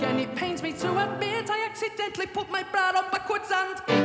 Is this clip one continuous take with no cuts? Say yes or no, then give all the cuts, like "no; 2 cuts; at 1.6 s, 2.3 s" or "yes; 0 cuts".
yes; 0 cuts